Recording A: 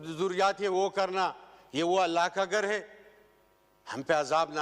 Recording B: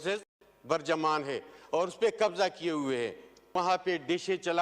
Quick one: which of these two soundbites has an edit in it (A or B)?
B